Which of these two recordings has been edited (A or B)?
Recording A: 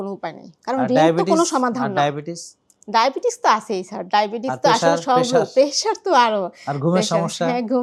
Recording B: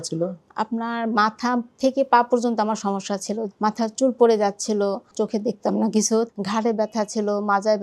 B